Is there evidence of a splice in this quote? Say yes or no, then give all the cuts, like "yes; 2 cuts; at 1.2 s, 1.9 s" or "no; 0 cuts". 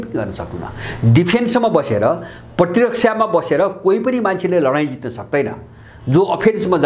no; 0 cuts